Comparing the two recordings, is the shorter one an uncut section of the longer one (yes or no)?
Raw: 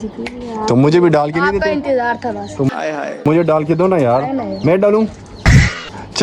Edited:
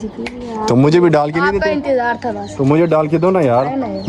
no